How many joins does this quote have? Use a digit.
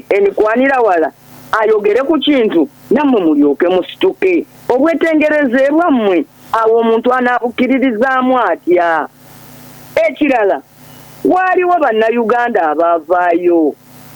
0